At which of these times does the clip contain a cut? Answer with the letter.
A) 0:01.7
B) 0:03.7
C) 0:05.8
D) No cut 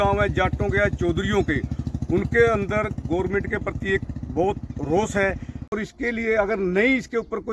C